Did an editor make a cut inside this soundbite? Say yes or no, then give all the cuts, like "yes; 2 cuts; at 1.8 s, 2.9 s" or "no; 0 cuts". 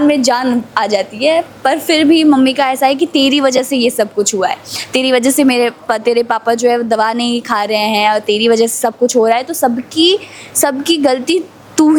no; 0 cuts